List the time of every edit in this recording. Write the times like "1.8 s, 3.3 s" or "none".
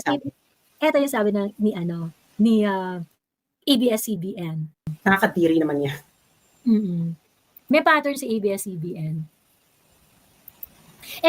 4.8 s